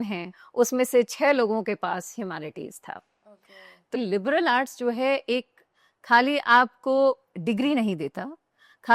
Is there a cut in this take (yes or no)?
yes